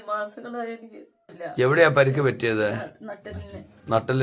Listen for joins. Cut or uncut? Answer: cut